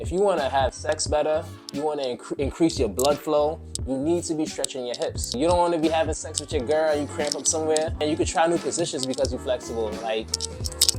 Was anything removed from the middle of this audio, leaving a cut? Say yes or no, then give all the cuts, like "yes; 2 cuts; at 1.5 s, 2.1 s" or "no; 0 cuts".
yes; 2 cuts; at 5.3 s, 8.0 s